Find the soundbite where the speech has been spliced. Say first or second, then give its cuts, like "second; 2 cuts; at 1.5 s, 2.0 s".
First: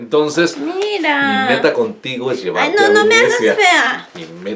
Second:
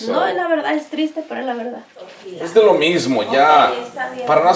second; 1 cut; at 2.2 s